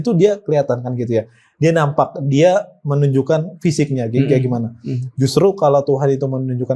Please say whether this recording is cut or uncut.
uncut